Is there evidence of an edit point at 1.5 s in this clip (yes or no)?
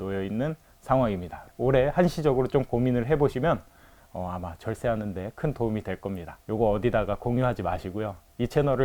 yes